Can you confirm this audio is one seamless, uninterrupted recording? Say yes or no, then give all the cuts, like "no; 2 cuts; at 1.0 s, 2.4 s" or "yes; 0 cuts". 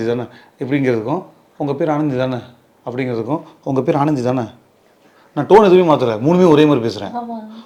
yes; 0 cuts